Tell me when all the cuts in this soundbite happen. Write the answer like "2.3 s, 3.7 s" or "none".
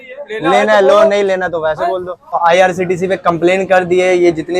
2.3 s